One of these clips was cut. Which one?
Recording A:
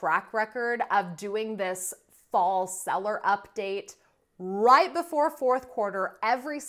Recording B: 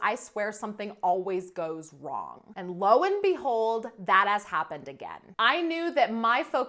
B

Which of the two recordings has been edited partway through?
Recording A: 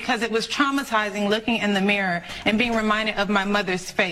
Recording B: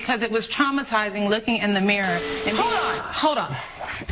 B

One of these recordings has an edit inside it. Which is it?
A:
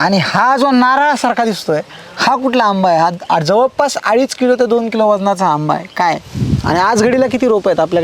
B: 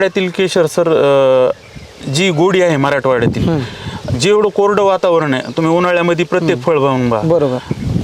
A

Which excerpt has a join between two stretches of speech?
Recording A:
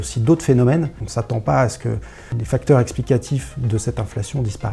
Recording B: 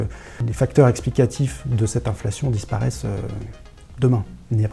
A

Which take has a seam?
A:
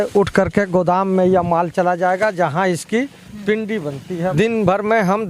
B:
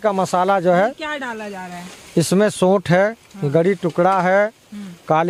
A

